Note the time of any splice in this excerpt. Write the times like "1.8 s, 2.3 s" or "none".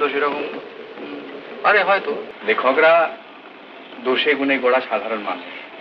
2.3 s

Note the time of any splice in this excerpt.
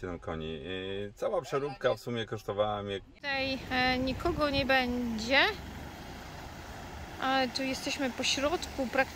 3.2 s

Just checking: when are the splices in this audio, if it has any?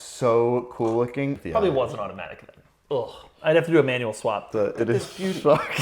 1.3 s, 4.5 s

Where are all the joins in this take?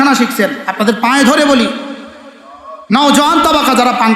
none

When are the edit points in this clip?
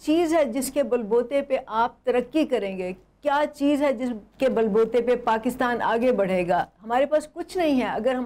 none

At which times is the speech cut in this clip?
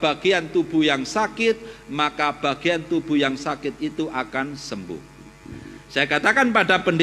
none

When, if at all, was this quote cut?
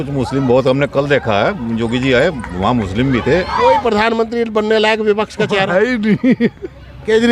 3.6 s

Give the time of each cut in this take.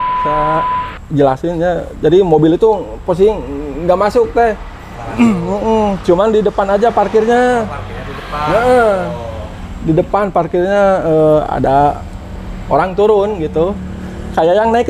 1.0 s

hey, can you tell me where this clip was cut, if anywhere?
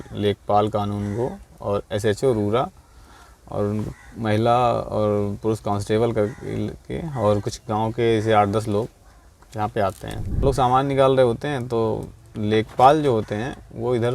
10.4 s

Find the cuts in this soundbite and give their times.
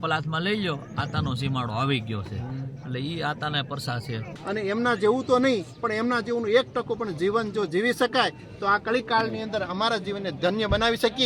4.3 s

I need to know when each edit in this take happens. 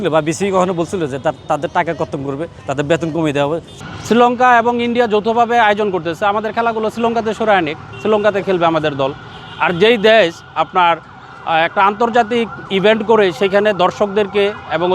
3.7 s

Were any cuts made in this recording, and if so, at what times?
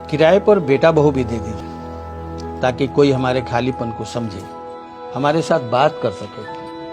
1.6 s

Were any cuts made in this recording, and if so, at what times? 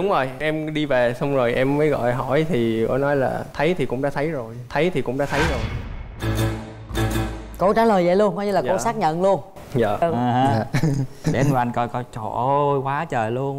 10.0 s

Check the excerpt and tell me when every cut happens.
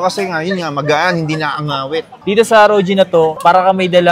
2.2 s

